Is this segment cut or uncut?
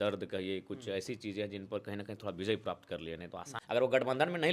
cut